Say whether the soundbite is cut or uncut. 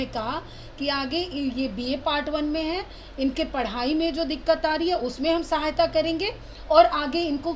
uncut